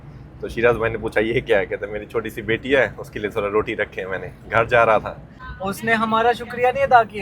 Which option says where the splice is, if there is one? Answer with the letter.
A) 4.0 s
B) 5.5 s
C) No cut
B